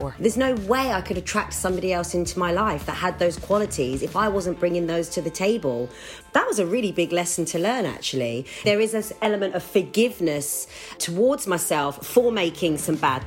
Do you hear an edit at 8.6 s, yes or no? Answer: yes